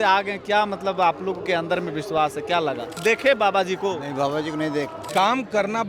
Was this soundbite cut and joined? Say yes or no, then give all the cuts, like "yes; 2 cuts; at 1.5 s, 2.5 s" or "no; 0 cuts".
yes; 2 cuts; at 2.9 s, 5.0 s